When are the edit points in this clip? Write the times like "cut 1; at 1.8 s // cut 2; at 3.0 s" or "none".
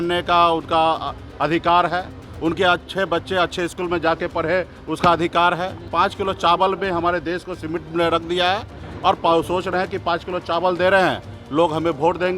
cut 1; at 5.8 s